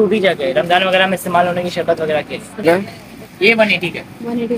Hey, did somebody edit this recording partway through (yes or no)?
yes